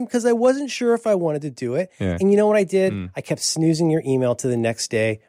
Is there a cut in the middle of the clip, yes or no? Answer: no